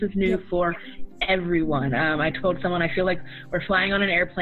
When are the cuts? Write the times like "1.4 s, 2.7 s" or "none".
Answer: none